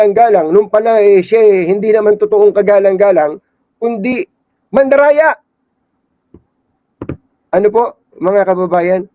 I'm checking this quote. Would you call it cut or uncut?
uncut